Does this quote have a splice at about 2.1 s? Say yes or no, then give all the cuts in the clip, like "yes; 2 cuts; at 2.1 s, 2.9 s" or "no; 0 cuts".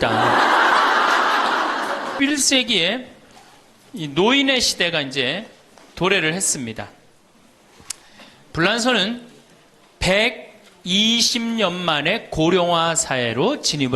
yes; 1 cut; at 2.1 s